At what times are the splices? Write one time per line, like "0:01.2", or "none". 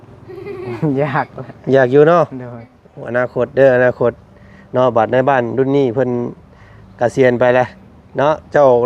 none